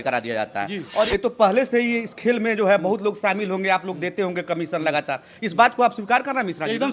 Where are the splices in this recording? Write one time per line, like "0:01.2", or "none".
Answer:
0:01.1